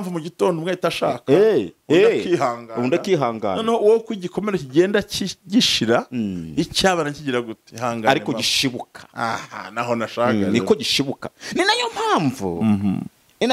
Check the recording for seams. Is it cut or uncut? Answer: uncut